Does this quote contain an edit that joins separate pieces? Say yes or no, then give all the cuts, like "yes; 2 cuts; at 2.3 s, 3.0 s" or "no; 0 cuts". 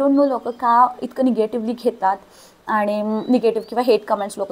no; 0 cuts